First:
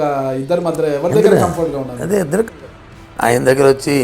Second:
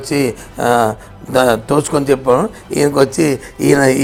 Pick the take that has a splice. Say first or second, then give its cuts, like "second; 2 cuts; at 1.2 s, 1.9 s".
first; 1 cut; at 2.5 s